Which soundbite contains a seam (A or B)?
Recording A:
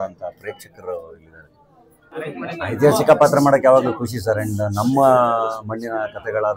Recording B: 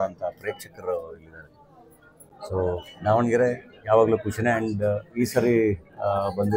A